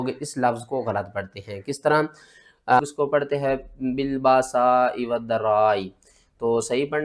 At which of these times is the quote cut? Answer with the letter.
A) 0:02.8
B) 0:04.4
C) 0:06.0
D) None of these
A